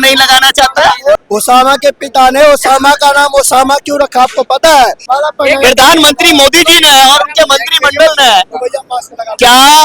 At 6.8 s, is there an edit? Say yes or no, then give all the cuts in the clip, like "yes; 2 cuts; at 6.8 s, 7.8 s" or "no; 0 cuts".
no; 2 cuts; at 1.2 s, 5.1 s